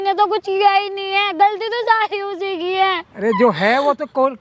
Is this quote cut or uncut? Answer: uncut